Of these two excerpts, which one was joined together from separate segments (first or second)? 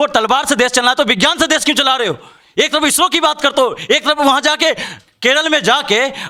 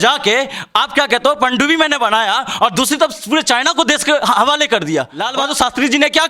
second